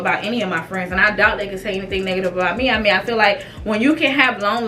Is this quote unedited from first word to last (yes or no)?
yes